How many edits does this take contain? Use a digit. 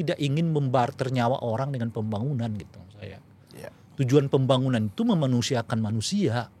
0